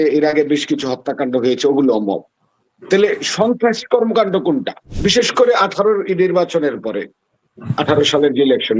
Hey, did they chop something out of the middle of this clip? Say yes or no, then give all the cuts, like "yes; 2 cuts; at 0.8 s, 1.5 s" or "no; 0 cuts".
yes; 1 cut; at 4.8 s